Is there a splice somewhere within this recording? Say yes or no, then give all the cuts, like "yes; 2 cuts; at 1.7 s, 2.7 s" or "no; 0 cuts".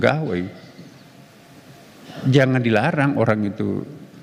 no; 0 cuts